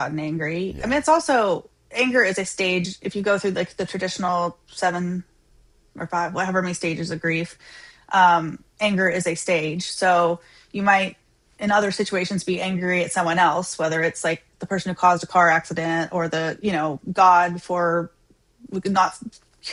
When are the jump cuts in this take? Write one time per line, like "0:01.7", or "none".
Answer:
none